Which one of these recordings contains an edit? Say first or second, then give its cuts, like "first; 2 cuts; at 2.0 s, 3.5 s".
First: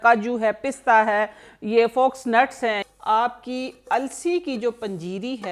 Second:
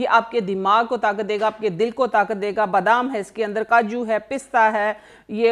first; 1 cut; at 2.8 s